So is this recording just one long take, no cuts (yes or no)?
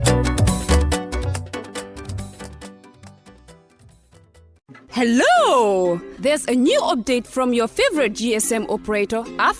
no